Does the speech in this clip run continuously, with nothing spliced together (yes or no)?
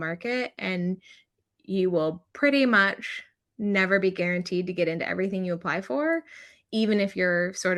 yes